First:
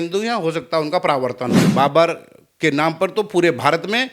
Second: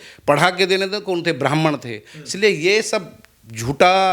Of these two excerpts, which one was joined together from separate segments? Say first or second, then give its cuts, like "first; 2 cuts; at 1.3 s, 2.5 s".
first; 1 cut; at 1.6 s